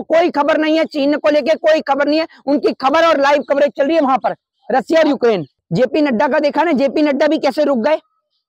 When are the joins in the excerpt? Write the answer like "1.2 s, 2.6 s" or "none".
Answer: none